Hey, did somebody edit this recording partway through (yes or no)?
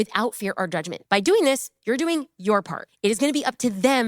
yes